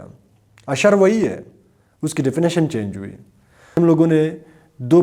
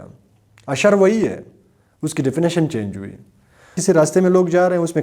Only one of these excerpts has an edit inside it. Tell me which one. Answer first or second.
second